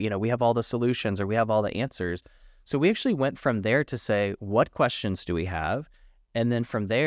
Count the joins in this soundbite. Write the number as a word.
zero